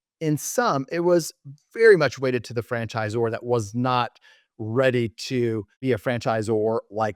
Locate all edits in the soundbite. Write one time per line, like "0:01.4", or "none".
0:05.7